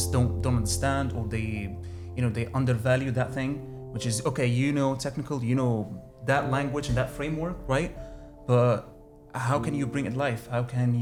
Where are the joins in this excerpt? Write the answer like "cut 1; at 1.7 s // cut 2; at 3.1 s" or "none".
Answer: none